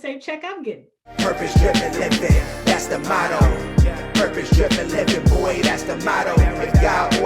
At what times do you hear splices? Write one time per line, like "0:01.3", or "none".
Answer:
0:00.9

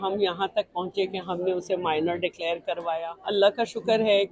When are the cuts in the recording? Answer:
0:03.0

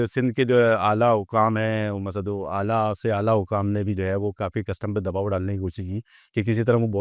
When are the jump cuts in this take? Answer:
none

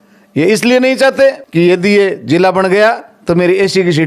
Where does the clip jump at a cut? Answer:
0:01.4

